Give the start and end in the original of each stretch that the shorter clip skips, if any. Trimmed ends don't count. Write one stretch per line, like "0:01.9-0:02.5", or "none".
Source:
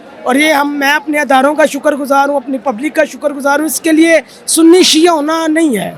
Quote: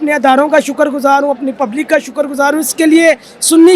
none